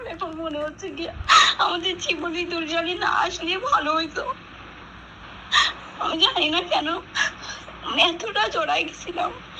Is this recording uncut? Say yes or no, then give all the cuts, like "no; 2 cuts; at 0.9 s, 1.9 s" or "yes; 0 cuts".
yes; 0 cuts